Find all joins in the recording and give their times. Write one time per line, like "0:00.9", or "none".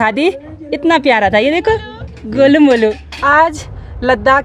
0:03.1